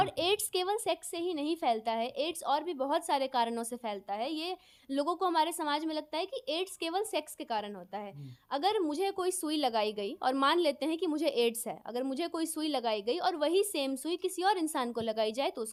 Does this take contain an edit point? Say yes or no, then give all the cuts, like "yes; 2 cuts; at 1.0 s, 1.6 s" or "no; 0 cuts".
no; 0 cuts